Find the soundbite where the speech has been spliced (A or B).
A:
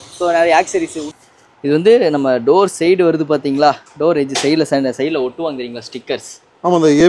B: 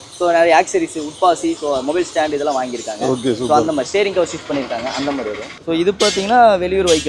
A